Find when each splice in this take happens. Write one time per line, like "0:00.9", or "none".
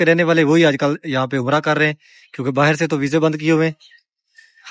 none

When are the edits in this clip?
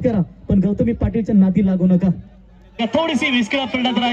0:02.6

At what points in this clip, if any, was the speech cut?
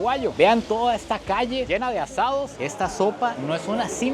0:02.6

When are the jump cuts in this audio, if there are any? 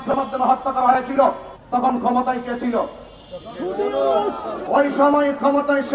0:04.7

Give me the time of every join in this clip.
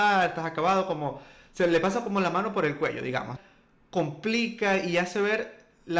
0:03.3

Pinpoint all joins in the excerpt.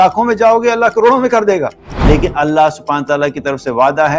0:01.9

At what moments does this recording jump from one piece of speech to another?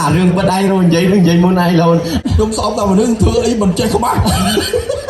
0:02.2

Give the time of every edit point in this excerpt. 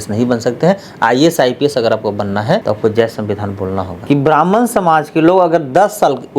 0:02.6
0:04.0

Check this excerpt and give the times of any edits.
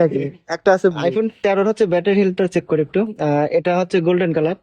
0:01.0

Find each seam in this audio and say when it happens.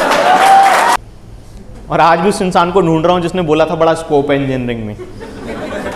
0:00.9

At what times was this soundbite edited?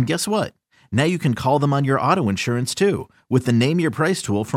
none

